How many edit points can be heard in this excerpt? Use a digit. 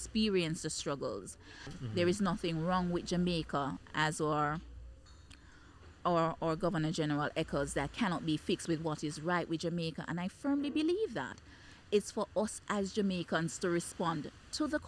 1